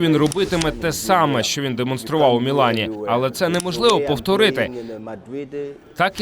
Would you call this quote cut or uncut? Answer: uncut